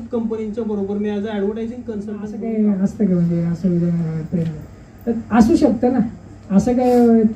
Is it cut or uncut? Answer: cut